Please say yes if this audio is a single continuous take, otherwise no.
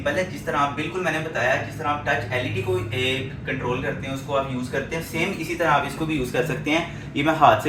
yes